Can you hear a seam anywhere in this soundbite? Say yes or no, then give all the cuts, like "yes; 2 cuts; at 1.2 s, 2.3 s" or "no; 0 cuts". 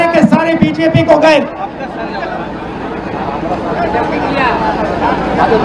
no; 0 cuts